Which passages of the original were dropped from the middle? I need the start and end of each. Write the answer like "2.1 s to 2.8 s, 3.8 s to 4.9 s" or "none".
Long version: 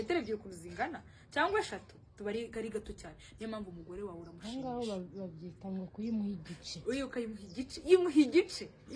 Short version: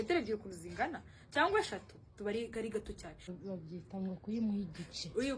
3.3 s to 5.0 s